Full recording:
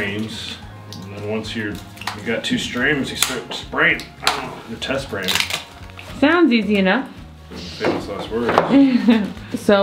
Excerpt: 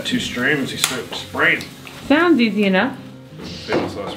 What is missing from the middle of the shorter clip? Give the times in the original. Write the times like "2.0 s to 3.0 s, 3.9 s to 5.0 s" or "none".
4.1 s to 5.8 s